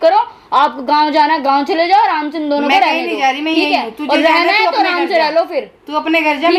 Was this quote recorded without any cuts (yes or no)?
yes